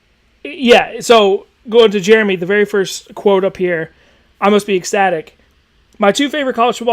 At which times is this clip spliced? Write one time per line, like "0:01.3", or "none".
0:02.9